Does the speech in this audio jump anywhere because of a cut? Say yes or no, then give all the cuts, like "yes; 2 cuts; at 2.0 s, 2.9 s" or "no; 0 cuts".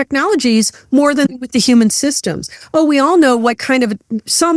yes; 1 cut; at 1.3 s